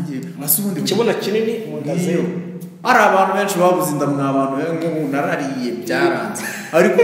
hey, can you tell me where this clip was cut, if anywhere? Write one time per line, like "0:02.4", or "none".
0:02.7